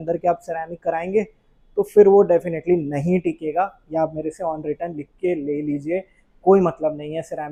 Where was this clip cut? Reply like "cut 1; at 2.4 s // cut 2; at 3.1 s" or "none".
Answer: none

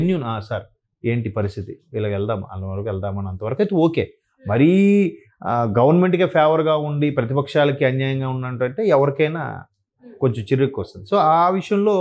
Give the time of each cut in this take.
none

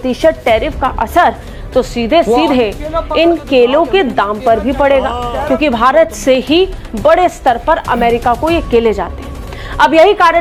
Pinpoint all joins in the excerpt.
none

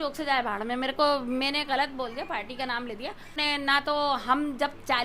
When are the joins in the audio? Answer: cut 1; at 3.4 s

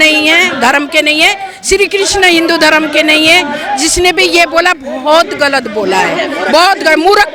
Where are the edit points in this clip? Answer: none

